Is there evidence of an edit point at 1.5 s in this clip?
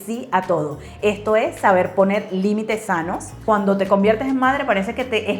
no; 1 cut; at 3.4 s

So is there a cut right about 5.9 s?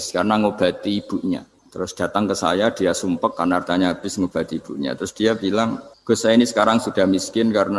yes; 2 cuts; at 1.6 s, 5.9 s

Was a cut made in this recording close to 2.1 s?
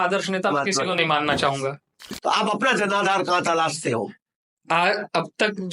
yes; 1 cut; at 2.1 s

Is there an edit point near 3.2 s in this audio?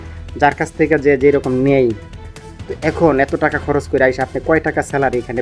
no; 0 cuts

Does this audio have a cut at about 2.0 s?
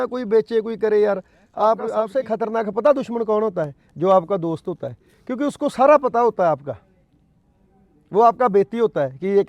yes; 1 cut; at 2.0 s

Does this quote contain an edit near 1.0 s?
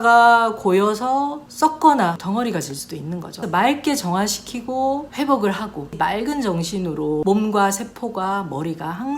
no; 4 cuts; at 2.2 s, 3.4 s, 5.9 s, 7.2 s

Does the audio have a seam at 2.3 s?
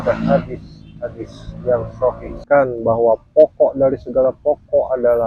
yes; 1 cut; at 2.3 s

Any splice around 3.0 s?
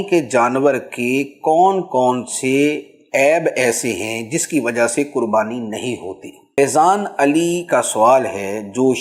no; 1 cut; at 6.6 s

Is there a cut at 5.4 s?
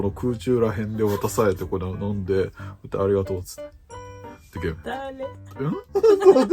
yes; 1 cut; at 5.4 s

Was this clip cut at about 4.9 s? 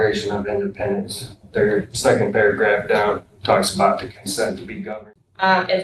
yes; 1 cut; at 4.9 s

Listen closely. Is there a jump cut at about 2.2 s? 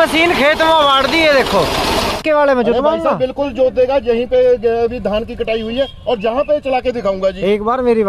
yes; 1 cut; at 2.2 s

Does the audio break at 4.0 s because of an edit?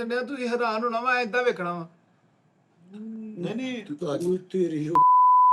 yes; 1 cut; at 4.0 s

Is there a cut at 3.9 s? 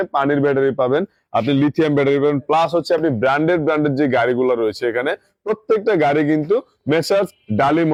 no; 0 cuts

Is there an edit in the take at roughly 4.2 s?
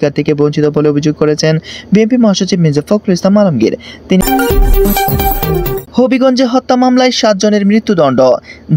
yes; 2 cuts; at 4.2 s, 5.9 s

